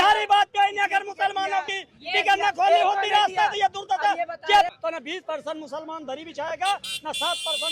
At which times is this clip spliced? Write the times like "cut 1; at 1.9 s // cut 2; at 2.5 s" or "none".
cut 1; at 4.7 s